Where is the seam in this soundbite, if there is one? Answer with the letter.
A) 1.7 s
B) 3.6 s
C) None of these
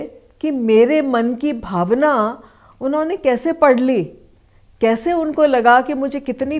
C